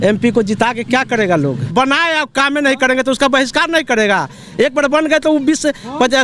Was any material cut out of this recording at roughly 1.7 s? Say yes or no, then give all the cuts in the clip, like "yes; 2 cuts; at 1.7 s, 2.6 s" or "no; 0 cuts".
yes; 1 cut; at 1.7 s